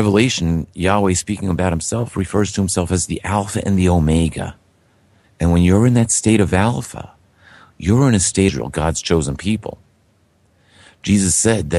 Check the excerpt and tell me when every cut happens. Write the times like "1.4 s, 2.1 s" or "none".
none